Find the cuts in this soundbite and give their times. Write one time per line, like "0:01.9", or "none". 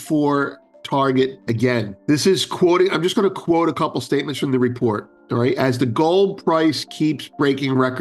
0:01.9